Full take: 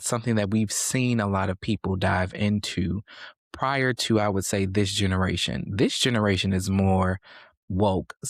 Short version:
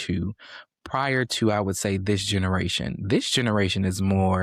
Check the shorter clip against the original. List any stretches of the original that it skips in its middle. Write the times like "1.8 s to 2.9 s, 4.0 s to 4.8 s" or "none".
none